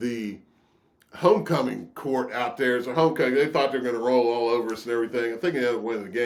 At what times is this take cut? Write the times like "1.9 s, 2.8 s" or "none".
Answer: none